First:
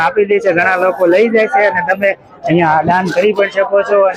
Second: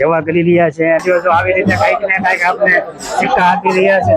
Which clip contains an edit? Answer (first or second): second